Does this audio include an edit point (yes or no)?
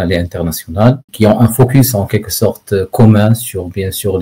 yes